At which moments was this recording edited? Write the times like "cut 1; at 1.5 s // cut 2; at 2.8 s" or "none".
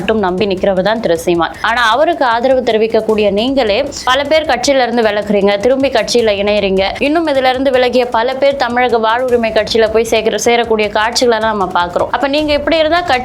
cut 1; at 4.0 s // cut 2; at 6.9 s // cut 3; at 12.1 s